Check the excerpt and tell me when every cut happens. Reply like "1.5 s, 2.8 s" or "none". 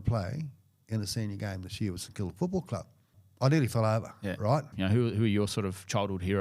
3.2 s, 4.7 s